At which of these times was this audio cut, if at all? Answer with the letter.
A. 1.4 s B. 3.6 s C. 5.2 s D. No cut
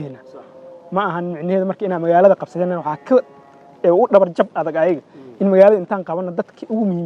D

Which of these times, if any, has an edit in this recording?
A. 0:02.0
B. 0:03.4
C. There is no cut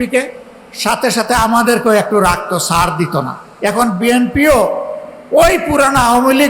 B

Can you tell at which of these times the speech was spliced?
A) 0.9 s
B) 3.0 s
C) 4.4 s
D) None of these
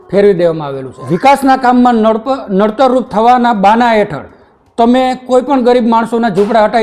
A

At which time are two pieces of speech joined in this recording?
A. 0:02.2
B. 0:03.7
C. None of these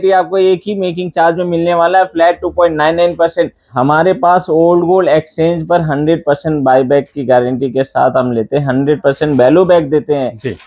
B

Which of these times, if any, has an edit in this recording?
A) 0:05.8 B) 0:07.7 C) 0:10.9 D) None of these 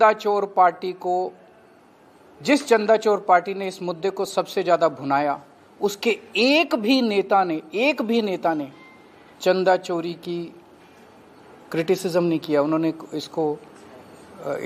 D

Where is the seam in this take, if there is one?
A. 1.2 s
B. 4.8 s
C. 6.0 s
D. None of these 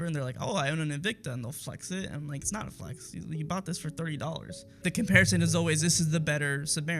B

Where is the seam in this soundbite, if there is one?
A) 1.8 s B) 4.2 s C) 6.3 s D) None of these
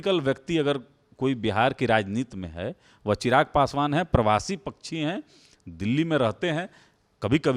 D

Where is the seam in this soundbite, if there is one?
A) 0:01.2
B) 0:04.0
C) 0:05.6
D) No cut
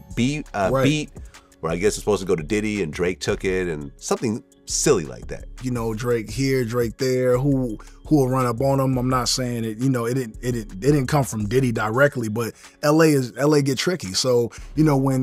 C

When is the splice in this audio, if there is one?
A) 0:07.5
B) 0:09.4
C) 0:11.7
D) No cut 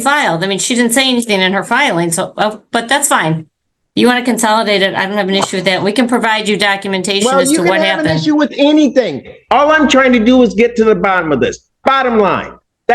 D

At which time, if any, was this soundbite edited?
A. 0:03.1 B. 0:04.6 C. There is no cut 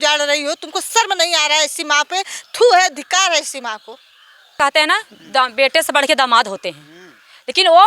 B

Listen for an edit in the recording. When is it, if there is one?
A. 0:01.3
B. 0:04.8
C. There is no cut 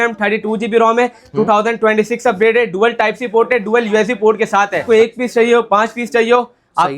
B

